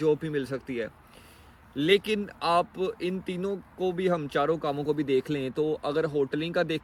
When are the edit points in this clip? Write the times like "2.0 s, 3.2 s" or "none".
none